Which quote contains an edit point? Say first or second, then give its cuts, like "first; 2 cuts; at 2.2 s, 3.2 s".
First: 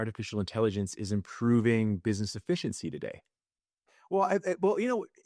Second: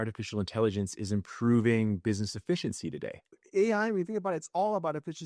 second; 1 cut; at 3.4 s